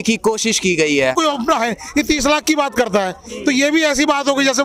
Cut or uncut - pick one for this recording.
cut